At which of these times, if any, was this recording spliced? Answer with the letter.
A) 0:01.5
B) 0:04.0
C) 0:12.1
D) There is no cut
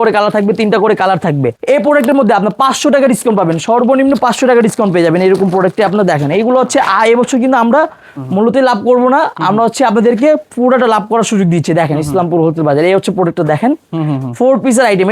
A